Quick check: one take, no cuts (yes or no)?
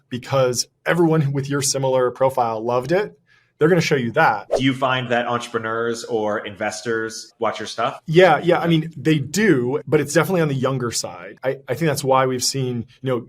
no